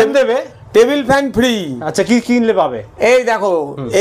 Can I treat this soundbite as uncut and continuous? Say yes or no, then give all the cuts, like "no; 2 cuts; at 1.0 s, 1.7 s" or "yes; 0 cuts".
yes; 0 cuts